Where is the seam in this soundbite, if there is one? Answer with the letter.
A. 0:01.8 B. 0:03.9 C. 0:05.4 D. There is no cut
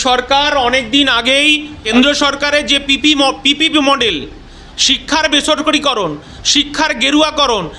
A